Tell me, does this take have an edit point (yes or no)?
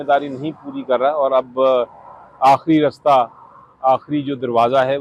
no